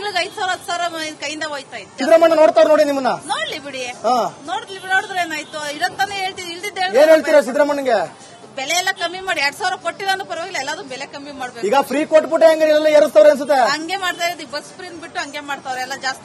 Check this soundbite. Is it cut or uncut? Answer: cut